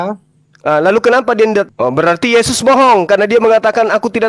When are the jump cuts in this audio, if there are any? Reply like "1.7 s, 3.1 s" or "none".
1.7 s